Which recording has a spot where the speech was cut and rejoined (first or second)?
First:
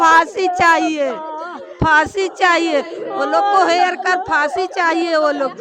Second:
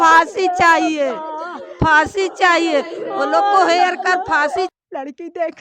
second